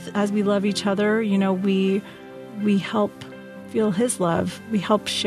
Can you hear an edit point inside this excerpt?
no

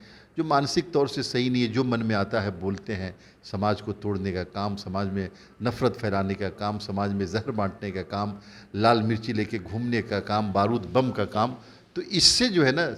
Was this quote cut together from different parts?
no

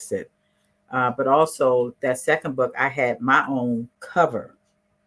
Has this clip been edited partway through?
yes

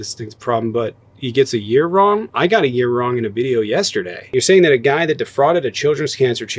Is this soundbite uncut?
no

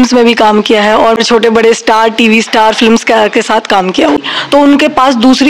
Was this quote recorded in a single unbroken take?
no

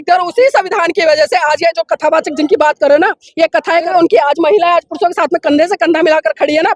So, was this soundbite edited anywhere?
yes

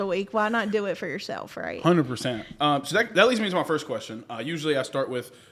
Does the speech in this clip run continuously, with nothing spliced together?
yes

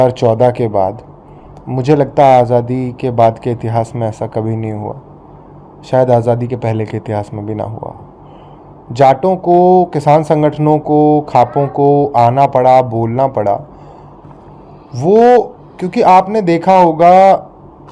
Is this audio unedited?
yes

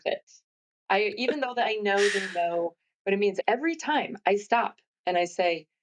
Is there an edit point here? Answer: yes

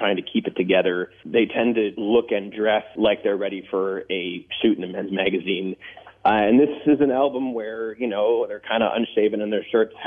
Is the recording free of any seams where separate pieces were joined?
no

